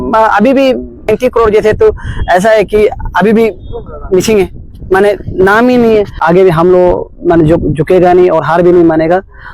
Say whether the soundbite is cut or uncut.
cut